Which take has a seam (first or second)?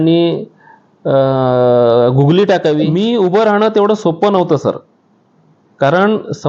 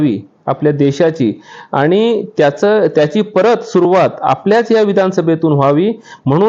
first